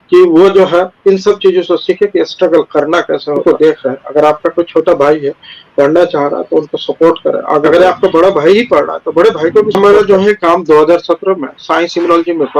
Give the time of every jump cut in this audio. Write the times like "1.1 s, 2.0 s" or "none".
3.4 s, 7.7 s, 9.8 s